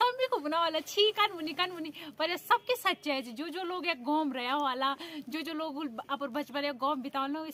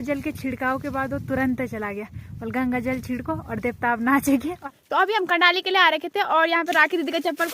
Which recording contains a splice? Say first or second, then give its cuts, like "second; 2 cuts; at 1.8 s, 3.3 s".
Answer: second; 1 cut; at 4.6 s